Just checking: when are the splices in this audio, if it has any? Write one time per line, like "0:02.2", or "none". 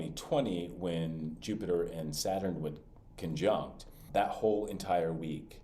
0:04.0